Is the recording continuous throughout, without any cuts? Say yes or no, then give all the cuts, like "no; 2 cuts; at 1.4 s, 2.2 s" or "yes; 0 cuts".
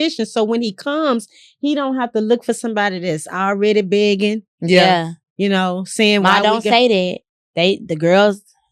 yes; 0 cuts